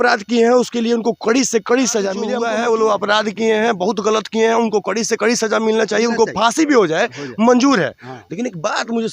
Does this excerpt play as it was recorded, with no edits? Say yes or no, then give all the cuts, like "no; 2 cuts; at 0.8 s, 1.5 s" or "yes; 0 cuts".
no; 1 cut; at 2.3 s